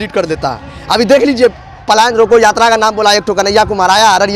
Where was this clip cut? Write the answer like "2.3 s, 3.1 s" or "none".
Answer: none